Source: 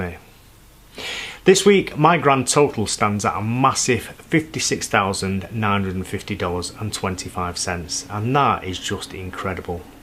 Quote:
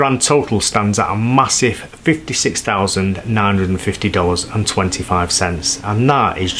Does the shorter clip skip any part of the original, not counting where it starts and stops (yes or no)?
no